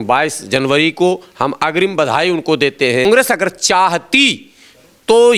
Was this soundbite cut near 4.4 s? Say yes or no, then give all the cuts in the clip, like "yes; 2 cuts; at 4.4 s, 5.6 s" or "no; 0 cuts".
no; 1 cut; at 3.1 s